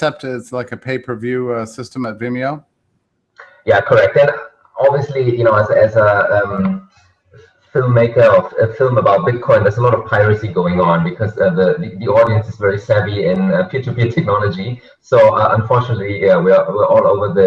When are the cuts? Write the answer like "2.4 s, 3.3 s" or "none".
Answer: 13.3 s